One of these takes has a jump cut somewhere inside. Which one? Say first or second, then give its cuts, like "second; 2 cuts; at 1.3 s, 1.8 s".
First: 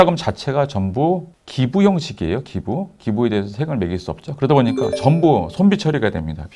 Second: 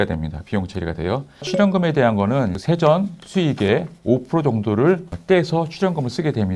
second; 3 cuts; at 1.5 s, 2.6 s, 5.1 s